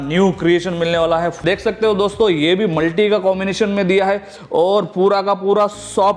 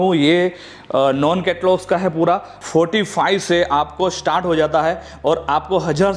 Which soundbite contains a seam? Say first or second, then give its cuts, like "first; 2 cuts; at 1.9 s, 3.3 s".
first; 1 cut; at 1.4 s